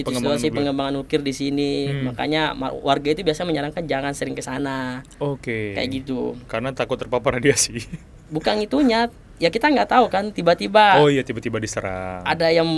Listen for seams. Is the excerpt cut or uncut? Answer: uncut